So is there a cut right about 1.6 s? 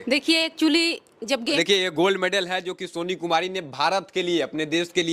yes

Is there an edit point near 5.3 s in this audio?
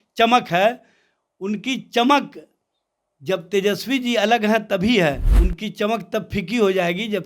yes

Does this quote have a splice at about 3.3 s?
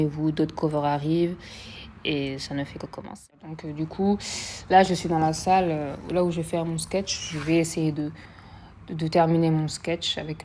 yes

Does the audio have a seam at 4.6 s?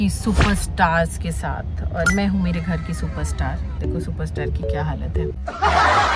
no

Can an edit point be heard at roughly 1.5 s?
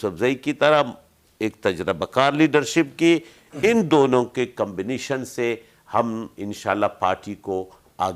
no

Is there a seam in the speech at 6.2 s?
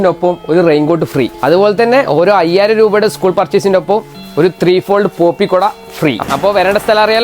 yes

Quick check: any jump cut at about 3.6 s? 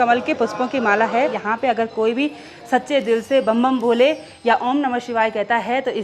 no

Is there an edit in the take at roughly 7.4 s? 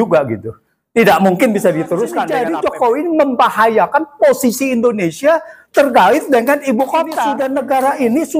yes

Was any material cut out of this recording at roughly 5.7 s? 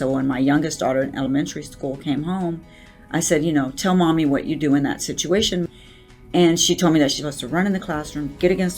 yes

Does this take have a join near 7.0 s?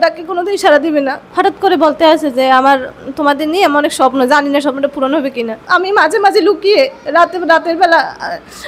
no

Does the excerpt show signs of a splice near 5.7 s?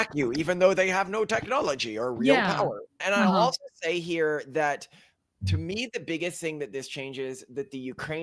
no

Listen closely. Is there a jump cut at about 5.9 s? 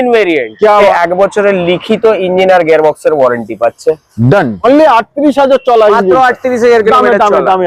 no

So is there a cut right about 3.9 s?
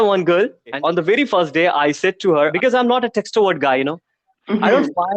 no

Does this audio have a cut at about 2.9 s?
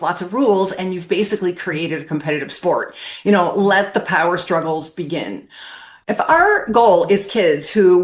no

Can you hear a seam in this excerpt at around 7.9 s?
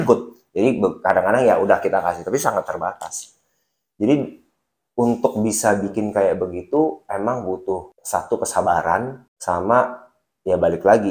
yes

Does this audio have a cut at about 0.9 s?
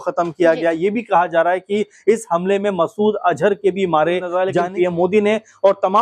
no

